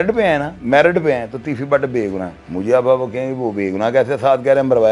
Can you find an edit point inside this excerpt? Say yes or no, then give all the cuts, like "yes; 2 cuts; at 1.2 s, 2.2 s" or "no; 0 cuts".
no; 0 cuts